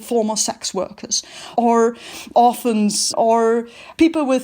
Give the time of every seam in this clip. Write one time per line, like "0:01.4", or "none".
0:01.5